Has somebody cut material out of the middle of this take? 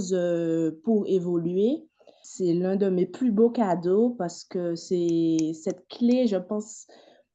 yes; 1 cut; at 2.2 s

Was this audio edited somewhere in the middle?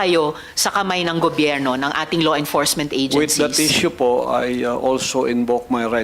no; 0 cuts

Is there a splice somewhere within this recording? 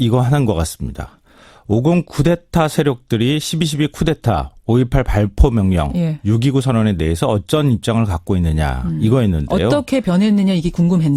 yes; 1 cut; at 7.3 s

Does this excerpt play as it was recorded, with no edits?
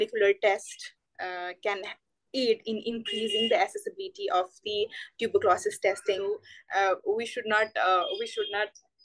no; 1 cut; at 6.5 s

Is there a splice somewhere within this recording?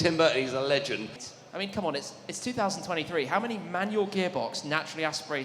yes; 1 cut; at 1.2 s

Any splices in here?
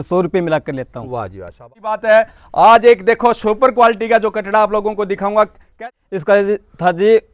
yes; 2 cuts; at 1.7 s, 5.6 s

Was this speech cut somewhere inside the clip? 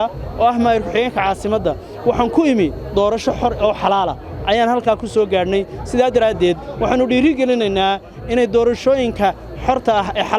no; 0 cuts

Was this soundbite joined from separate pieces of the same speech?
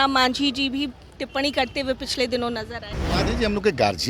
yes; 1 cut; at 3.0 s

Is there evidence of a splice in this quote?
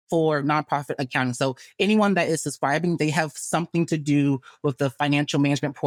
no; 0 cuts

